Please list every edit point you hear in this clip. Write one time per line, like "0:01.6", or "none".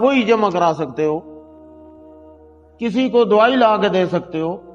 0:01.3
0:02.7